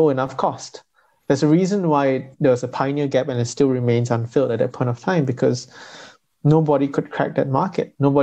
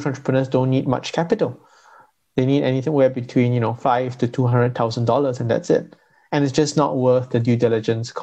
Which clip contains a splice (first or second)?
first